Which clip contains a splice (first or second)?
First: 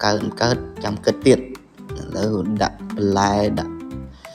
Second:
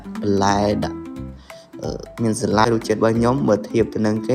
second